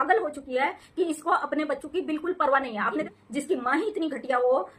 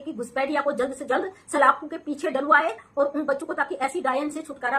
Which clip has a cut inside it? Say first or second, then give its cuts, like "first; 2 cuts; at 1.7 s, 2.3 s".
first; 1 cut; at 3.1 s